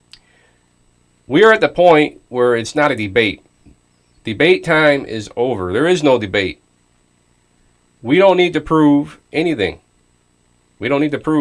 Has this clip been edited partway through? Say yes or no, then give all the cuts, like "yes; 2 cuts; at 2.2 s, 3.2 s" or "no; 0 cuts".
no; 0 cuts